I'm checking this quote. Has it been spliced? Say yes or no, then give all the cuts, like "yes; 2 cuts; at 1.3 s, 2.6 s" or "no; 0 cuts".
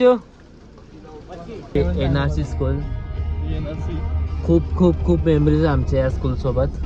yes; 1 cut; at 1.8 s